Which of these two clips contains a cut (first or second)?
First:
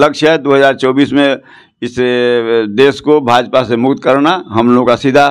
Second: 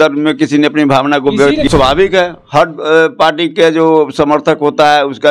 second